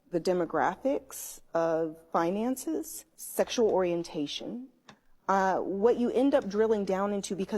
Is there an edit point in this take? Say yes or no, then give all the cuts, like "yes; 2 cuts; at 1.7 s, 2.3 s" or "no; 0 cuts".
no; 0 cuts